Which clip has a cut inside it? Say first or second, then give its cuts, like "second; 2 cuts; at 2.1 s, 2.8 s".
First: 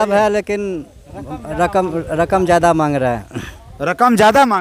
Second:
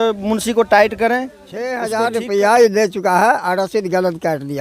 second; 1 cut; at 1.8 s